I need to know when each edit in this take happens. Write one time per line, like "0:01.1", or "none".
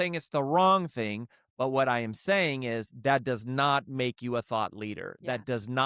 none